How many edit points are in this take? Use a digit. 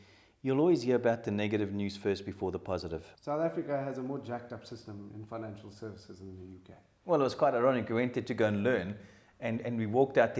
1